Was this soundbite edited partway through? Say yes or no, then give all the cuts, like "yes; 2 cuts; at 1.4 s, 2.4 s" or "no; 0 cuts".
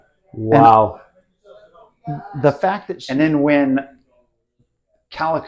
yes; 1 cut; at 2.9 s